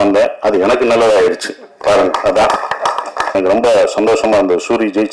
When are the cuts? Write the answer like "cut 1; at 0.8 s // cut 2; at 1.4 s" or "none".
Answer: cut 1; at 3.3 s